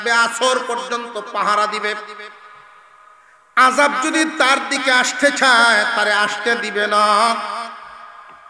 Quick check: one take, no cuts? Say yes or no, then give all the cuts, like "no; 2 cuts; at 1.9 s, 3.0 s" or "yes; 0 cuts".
yes; 0 cuts